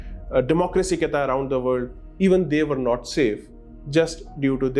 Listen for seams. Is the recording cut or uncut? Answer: uncut